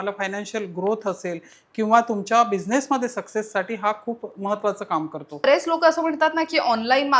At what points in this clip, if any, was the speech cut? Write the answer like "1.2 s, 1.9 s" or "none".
5.5 s